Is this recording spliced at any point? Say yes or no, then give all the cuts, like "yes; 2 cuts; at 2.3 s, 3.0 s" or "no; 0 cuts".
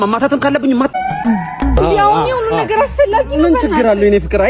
yes; 1 cut; at 0.9 s